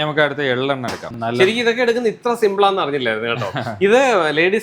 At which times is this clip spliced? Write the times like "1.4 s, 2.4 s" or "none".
1.1 s